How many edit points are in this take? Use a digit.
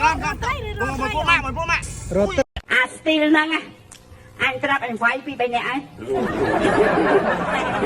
1